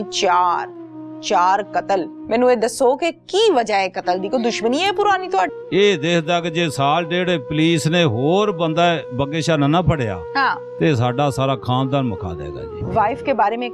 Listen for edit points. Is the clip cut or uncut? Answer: cut